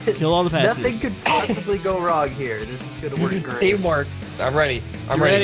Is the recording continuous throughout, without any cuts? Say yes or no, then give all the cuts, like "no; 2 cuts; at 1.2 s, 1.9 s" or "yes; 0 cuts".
no; 1 cut; at 4.3 s